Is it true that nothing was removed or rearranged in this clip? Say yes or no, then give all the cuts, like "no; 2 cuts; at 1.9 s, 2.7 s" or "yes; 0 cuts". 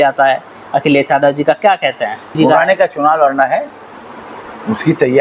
no; 1 cut; at 2.3 s